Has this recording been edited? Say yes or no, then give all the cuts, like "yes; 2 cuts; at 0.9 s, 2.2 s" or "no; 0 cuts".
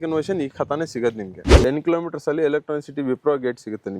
yes; 1 cut; at 1.5 s